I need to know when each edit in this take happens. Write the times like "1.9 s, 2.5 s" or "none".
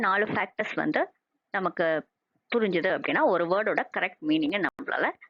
none